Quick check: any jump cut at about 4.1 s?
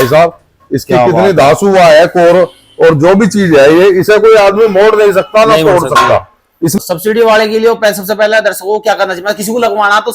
no; 1 cut; at 6.8 s

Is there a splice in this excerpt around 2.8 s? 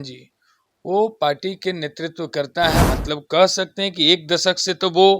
yes; 1 cut; at 2.8 s

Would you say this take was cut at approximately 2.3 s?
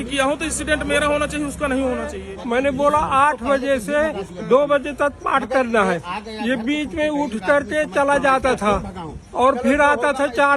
yes; 1 cut; at 2.3 s

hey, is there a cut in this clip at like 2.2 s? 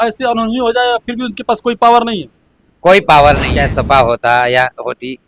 no; 1 cut; at 3.5 s

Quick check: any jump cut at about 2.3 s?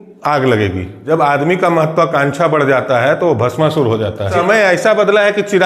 no; 2 cuts; at 0.9 s, 4.3 s

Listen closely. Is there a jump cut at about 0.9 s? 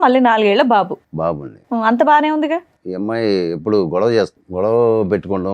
no; 2 cuts; at 2.8 s, 4.4 s

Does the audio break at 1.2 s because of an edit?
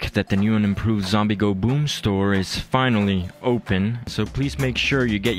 no; 1 cut; at 4.1 s

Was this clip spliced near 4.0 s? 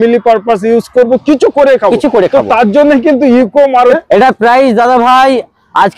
yes; 1 cut; at 4.0 s

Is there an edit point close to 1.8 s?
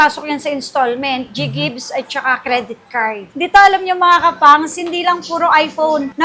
no; 1 cut; at 3.4 s

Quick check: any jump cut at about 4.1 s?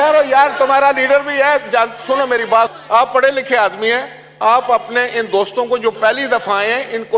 no; 1 cut; at 2.7 s

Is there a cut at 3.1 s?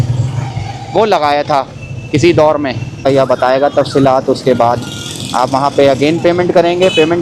yes; 1 cut; at 3.1 s

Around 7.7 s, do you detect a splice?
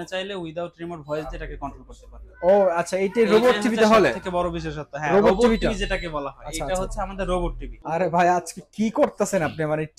yes; 1 cut; at 7.7 s

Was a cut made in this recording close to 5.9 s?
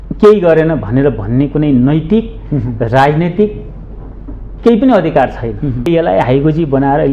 yes; 1 cut; at 5.9 s

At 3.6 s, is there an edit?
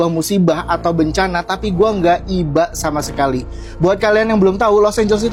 no; 0 cuts

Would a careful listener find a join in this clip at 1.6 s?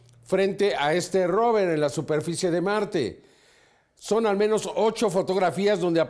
no; 1 cut; at 3.2 s

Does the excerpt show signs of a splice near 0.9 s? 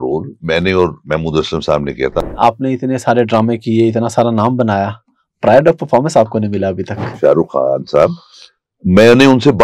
no; 2 cuts; at 2.2 s, 7.1 s

